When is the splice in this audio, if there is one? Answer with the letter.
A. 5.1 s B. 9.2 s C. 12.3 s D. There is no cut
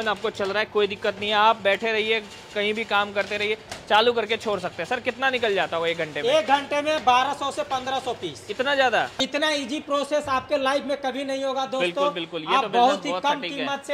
B